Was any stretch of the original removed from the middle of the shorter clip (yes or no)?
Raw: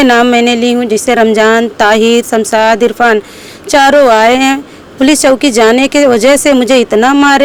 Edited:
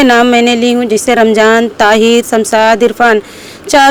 no